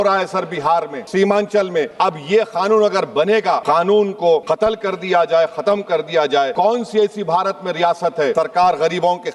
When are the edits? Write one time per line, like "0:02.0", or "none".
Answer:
0:01.0
0:01.9
0:03.6
0:04.4
0:06.5
0:08.3